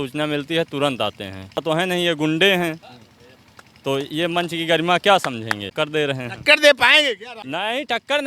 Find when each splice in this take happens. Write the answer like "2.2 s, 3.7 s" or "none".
1.6 s, 5.7 s